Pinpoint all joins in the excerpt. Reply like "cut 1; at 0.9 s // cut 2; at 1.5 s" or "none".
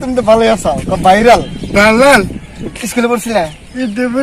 cut 1; at 2.7 s